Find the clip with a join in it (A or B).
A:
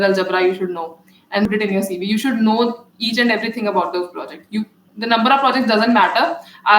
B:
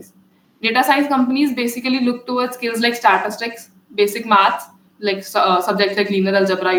A